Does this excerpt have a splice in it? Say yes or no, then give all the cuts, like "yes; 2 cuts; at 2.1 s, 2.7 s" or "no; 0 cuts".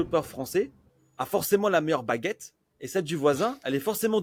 no; 0 cuts